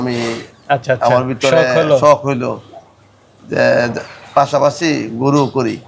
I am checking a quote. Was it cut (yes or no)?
no